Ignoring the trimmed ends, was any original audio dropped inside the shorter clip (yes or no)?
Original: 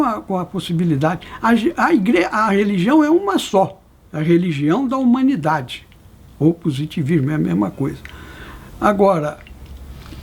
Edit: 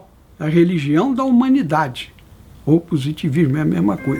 no